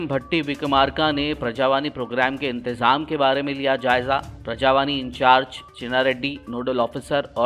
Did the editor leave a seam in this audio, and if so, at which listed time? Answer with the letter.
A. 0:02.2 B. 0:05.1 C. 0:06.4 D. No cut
D